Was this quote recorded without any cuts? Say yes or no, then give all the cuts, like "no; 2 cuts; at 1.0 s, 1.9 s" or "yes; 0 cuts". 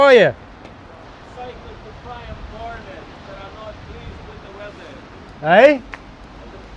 no; 1 cut; at 1.0 s